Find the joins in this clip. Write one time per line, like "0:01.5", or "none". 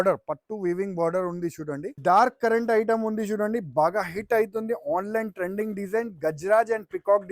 0:02.0

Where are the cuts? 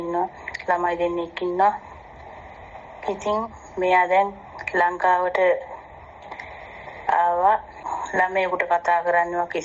0:07.9

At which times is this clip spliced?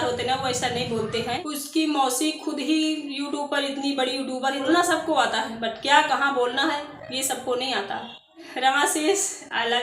0:01.4
0:04.6
0:08.5

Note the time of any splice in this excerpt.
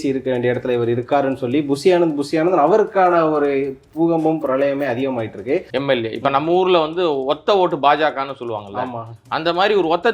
0:05.7

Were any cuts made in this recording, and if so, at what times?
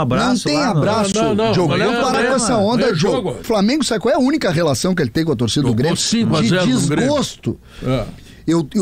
0:03.4

